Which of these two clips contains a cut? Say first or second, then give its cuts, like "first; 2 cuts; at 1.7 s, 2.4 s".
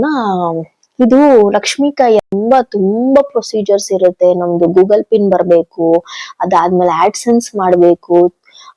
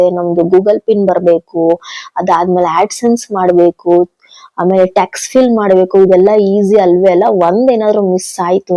first; 1 cut; at 2.2 s